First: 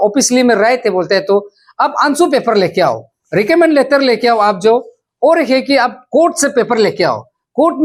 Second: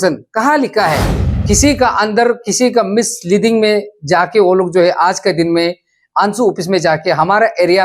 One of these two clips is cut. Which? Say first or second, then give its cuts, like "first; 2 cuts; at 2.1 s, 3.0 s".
second; 1 cut; at 1.2 s